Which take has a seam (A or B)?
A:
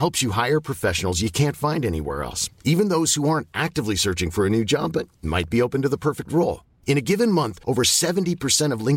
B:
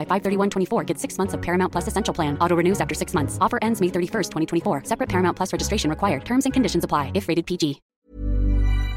B